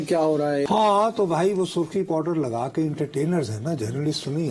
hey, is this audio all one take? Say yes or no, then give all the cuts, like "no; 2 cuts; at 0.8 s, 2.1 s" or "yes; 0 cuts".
yes; 0 cuts